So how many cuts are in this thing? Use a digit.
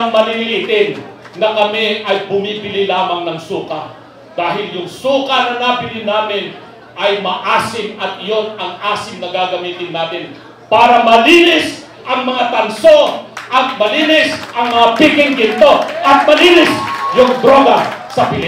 0